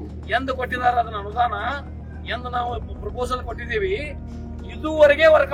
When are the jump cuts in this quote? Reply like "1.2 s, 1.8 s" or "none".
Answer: none